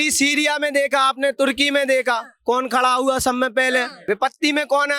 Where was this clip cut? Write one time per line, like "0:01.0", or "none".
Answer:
0:03.9